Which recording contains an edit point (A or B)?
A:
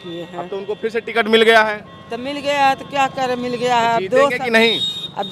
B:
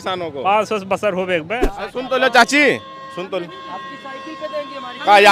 B